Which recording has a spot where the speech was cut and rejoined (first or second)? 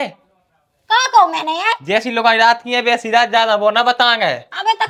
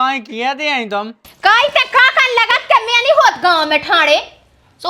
second